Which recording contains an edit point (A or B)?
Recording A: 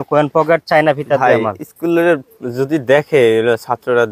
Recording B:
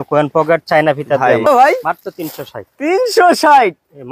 B